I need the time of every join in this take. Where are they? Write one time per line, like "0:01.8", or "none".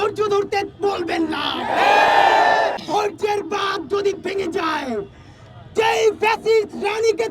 0:02.8